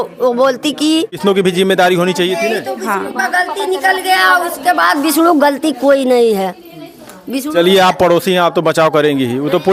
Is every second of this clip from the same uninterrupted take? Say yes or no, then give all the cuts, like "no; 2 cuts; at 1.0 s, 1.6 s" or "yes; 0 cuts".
no; 1 cut; at 1.2 s